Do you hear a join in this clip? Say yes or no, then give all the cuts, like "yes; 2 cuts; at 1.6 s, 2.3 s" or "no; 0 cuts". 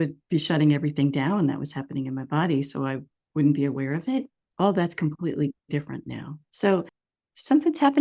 yes; 1 cut; at 4.4 s